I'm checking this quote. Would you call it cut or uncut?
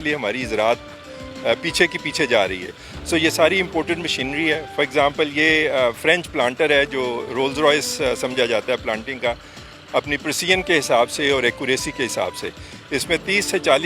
uncut